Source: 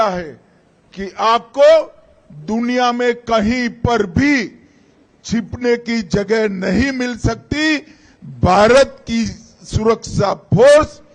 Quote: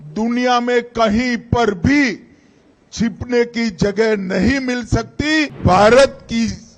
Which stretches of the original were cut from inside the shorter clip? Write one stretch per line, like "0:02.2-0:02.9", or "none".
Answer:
0:07.9-0:08.3